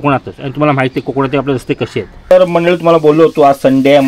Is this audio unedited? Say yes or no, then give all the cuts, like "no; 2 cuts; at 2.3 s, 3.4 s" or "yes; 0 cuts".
no; 1 cut; at 2.1 s